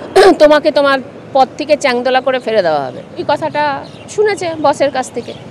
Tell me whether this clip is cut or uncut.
cut